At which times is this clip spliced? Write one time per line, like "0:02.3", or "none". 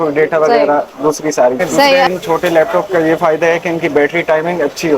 0:02.0